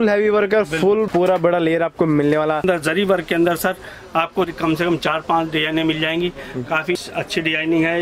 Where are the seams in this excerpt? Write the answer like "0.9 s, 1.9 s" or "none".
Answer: 1.1 s, 2.6 s